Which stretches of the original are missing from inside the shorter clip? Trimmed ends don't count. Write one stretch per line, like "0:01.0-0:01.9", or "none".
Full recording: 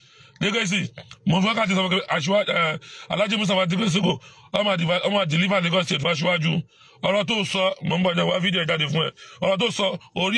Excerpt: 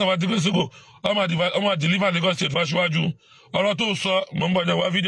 none